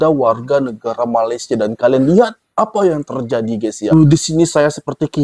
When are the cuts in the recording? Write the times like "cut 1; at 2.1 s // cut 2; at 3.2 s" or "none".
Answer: cut 1; at 3.9 s